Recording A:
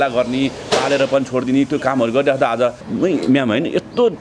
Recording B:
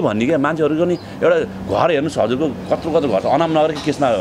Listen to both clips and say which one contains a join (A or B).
A